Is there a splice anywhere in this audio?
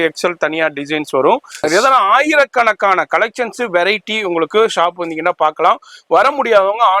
yes; 1 cut; at 1.5 s

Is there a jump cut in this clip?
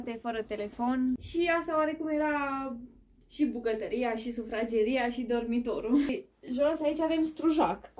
yes; 2 cuts; at 1.2 s, 6.2 s

